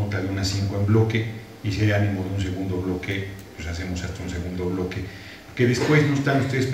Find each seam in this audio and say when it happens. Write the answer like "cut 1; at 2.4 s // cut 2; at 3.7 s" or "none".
cut 1; at 3.6 s